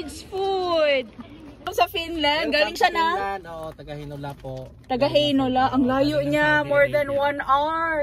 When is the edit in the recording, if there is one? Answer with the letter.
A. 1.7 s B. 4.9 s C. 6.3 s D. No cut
A